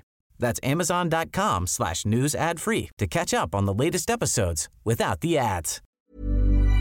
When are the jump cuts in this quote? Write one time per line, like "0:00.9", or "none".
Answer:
0:05.8